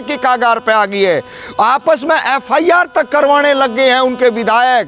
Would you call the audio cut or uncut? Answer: uncut